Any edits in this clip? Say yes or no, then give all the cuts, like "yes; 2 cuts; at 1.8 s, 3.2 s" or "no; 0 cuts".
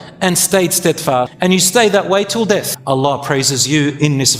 yes; 2 cuts; at 1.3 s, 2.7 s